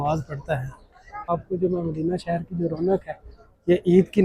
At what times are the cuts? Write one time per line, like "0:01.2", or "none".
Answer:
0:01.3